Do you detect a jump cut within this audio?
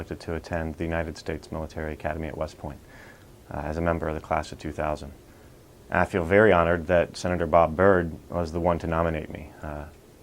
yes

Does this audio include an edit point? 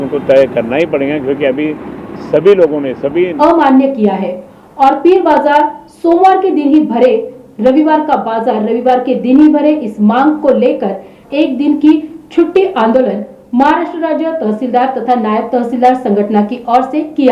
yes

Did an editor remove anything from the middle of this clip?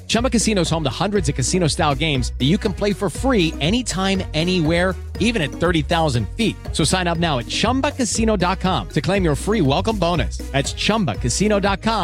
no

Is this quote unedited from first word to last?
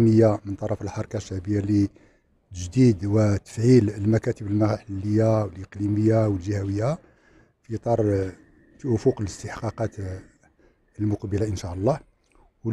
yes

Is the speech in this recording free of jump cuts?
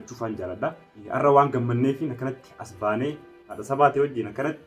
no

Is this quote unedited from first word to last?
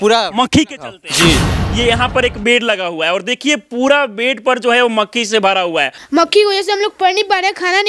no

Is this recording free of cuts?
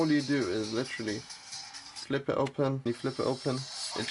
no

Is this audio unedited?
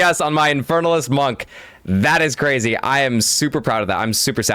yes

